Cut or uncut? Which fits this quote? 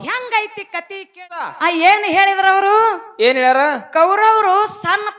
cut